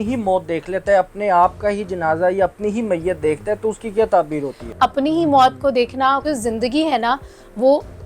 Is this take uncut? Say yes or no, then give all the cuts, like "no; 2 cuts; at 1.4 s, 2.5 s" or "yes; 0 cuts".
no; 2 cuts; at 4.6 s, 6.2 s